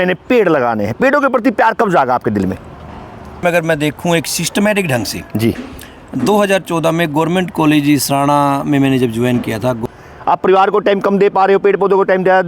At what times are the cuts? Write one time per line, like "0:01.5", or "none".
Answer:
0:03.4
0:09.8